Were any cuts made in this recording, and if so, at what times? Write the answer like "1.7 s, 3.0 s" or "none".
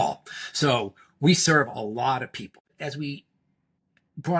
2.6 s